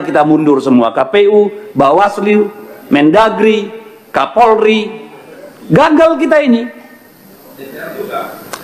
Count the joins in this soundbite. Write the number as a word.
zero